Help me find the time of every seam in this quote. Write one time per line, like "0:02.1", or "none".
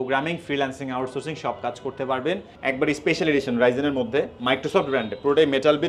0:02.5